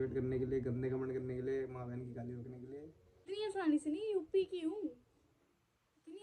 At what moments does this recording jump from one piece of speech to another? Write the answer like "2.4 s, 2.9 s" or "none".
3.3 s